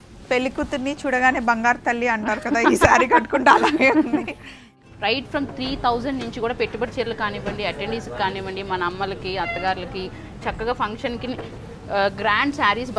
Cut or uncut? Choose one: cut